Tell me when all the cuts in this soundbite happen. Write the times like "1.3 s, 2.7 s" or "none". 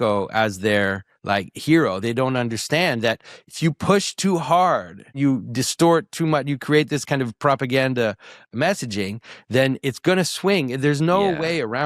5.0 s, 9.8 s